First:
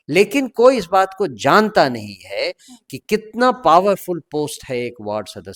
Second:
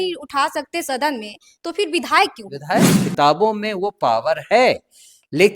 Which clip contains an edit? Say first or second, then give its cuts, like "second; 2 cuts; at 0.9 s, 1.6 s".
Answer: second; 1 cut; at 3.0 s